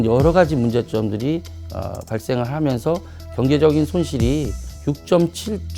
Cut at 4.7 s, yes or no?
yes